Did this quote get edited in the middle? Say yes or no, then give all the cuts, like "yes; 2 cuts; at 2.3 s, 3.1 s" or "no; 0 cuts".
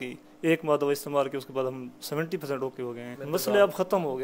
yes; 1 cut; at 3.2 s